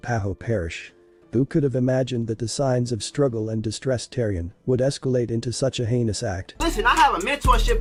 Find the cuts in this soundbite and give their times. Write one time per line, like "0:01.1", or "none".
none